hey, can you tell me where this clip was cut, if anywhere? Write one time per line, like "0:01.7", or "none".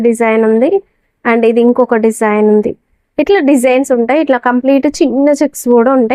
none